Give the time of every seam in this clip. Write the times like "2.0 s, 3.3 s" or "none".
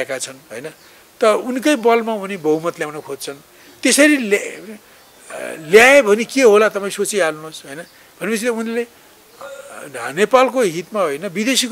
none

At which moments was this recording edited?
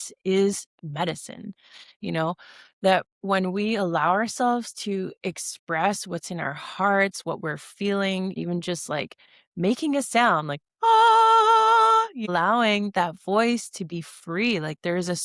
none

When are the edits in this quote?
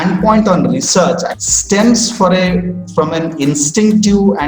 1.4 s

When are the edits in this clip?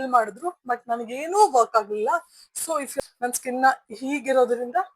2.9 s

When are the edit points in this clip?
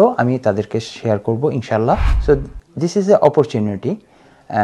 2.1 s

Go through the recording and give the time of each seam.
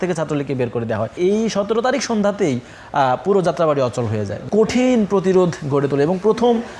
1.1 s, 4.4 s

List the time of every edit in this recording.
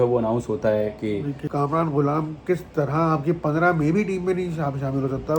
1.4 s

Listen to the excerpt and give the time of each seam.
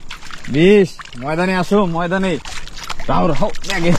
none

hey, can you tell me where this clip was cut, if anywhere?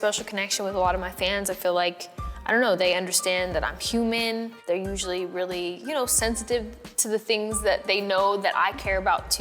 4.5 s

